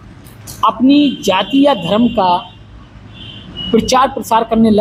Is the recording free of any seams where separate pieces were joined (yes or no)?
yes